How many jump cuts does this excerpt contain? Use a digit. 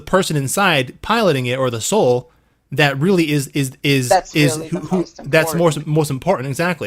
0